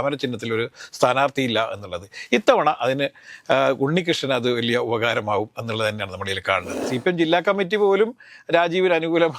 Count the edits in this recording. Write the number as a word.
one